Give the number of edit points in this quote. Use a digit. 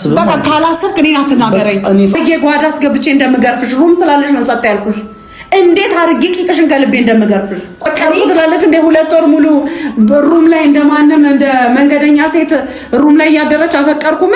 2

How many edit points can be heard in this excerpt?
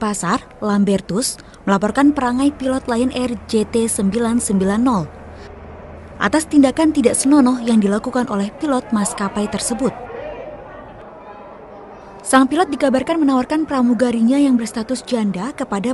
1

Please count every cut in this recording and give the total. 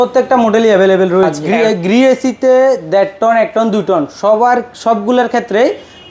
1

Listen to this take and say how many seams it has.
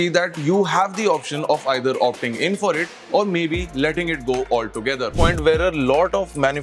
1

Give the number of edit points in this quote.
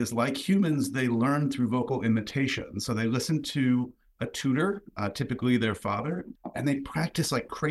1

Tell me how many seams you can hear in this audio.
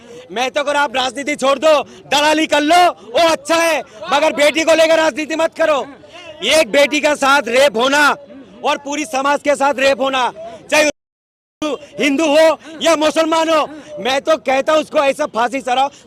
0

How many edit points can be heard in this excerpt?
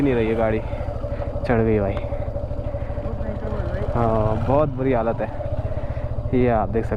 0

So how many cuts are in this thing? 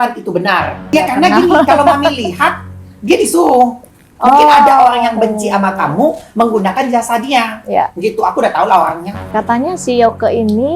2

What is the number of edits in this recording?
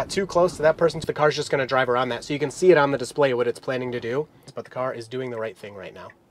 2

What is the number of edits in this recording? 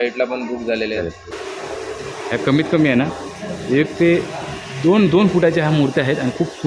1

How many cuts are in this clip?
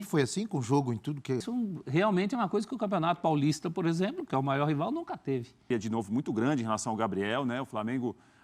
2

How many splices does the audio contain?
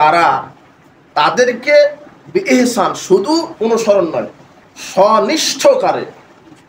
0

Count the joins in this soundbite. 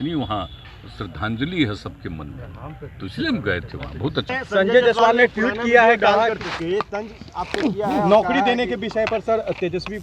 1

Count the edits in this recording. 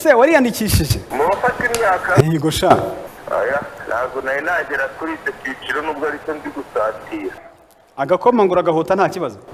3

